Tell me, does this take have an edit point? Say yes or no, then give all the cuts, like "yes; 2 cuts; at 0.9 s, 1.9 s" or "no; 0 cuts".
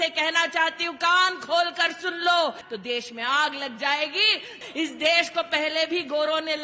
yes; 2 cuts; at 2.6 s, 4.6 s